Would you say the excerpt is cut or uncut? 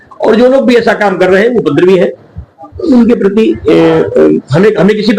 uncut